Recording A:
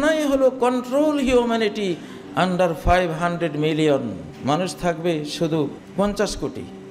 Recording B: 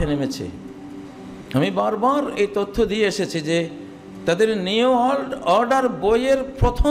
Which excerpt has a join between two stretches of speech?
A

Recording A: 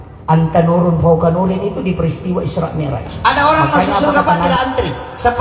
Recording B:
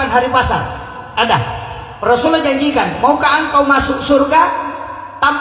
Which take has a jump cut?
A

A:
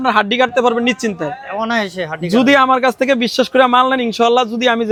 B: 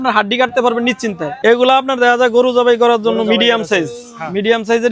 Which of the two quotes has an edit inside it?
B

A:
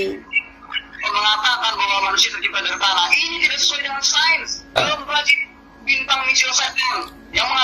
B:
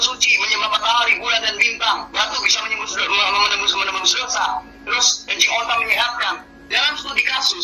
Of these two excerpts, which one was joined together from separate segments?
A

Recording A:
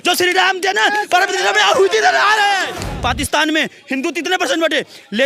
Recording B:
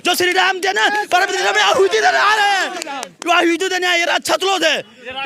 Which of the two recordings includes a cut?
A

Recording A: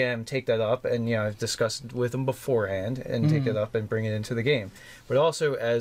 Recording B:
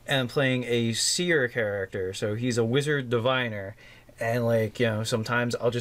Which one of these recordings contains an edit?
A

